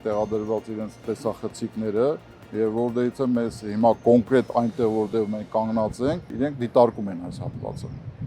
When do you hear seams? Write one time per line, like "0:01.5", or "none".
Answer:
0:06.3